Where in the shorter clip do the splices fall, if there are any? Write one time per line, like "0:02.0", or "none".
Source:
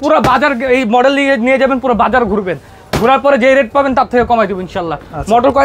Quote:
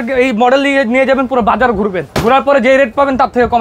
0:02.0